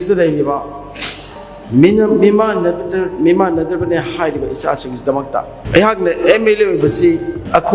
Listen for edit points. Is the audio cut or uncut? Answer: uncut